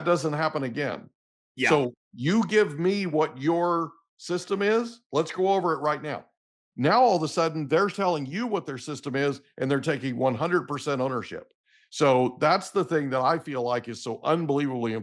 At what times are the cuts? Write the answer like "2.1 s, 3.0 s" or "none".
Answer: none